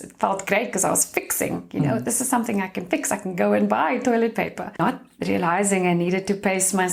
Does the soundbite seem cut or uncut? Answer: cut